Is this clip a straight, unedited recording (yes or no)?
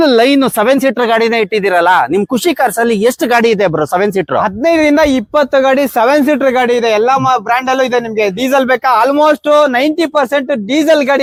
yes